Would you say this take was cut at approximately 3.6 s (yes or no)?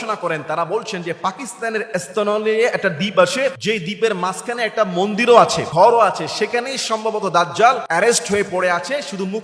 yes